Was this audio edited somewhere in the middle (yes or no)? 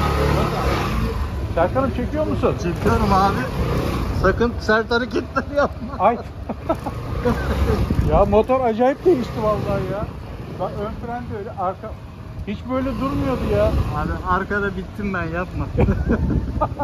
no